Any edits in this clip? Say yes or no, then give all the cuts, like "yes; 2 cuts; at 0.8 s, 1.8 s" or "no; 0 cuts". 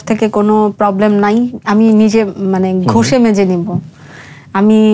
no; 0 cuts